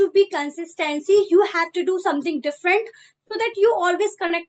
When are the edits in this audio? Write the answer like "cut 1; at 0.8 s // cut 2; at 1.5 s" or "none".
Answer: none